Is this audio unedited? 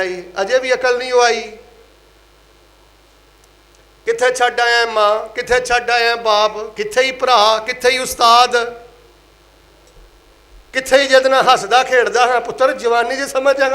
yes; 0 cuts

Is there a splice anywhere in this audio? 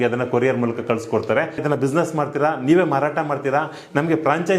yes; 1 cut; at 1.6 s

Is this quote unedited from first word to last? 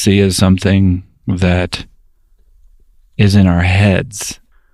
yes; 0 cuts

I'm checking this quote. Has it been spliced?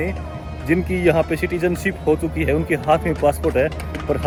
no; 0 cuts

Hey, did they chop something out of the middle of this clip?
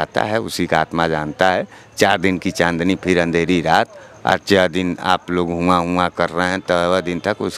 no; 0 cuts

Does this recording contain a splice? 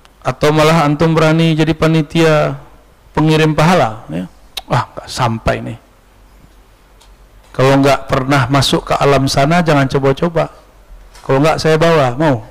no; 0 cuts

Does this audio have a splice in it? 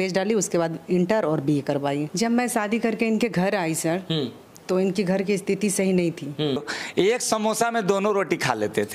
yes; 2 cuts; at 2.1 s, 6.8 s

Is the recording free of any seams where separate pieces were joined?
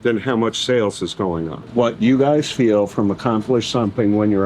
no; 1 cut; at 1.6 s

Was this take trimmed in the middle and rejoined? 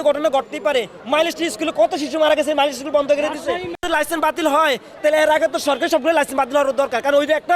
yes; 2 cuts; at 1.0 s, 3.7 s

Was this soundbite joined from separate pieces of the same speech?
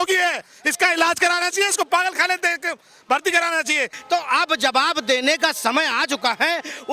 yes; 1 cut; at 3.9 s

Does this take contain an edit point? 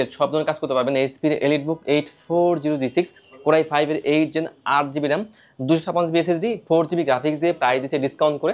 no; 0 cuts

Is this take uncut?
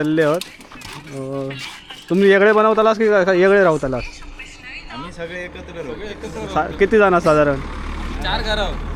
yes; 0 cuts

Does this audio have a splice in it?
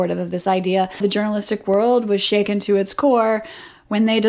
yes; 1 cut; at 1.0 s

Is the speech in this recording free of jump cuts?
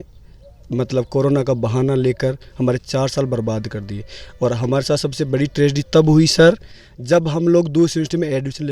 yes; 0 cuts

